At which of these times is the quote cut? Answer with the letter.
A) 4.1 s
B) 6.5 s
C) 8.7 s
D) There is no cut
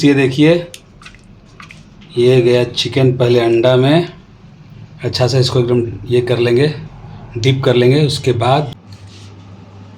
C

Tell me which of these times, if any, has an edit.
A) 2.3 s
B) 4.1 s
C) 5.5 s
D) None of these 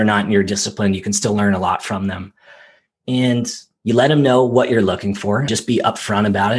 C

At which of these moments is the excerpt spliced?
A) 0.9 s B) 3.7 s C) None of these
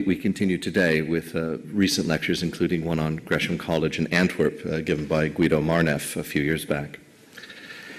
A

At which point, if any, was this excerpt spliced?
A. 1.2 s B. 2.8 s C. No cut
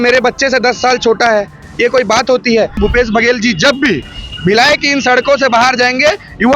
B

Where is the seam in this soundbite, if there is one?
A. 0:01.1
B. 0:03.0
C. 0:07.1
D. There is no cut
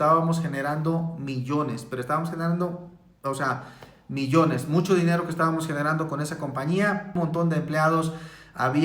C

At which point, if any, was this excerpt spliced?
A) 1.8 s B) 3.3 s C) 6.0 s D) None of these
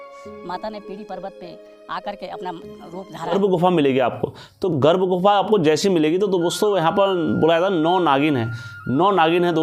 B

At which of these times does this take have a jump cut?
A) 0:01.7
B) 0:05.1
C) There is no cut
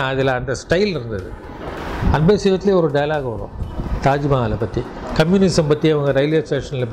A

